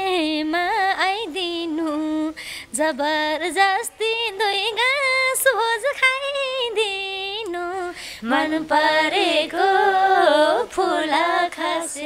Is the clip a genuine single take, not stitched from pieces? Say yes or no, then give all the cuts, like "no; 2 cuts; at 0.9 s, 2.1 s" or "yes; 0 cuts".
yes; 0 cuts